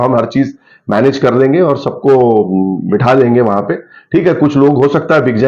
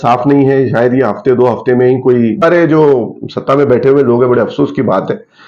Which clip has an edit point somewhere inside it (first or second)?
second